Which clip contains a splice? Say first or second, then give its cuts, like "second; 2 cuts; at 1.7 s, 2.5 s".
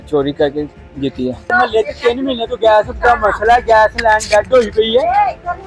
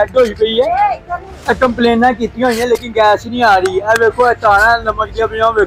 first; 1 cut; at 1.5 s